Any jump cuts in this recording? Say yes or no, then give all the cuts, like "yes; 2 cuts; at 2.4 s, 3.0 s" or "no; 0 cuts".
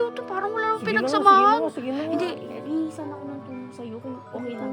yes; 1 cut; at 2.5 s